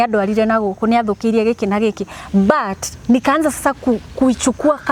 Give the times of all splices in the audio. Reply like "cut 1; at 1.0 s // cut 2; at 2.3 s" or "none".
none